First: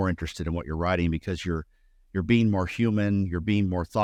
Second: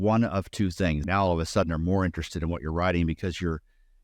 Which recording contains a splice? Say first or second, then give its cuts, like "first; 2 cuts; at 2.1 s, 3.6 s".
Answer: second; 1 cut; at 1.0 s